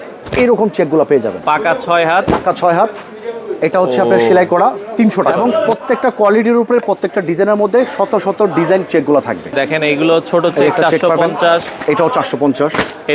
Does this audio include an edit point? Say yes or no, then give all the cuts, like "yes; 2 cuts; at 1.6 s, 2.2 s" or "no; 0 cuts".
yes; 3 cuts; at 1.3 s, 5.3 s, 9.5 s